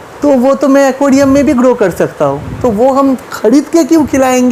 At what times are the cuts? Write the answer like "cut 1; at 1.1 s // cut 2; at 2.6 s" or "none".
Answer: none

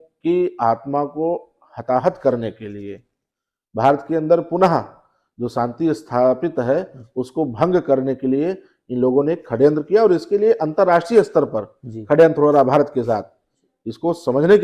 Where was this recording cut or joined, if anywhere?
none

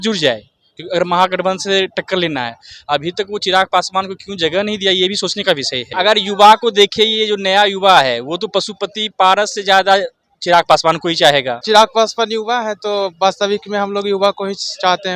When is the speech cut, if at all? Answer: cut 1; at 5.9 s // cut 2; at 11.6 s

